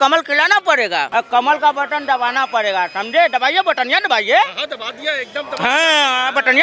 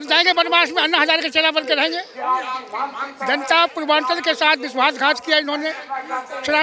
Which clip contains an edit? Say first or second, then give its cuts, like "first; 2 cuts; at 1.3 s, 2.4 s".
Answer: first; 1 cut; at 1.1 s